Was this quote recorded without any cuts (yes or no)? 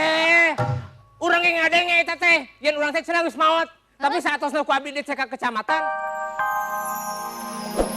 no